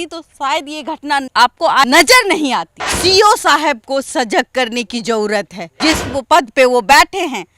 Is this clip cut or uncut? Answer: cut